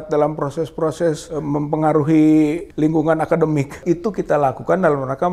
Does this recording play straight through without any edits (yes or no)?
no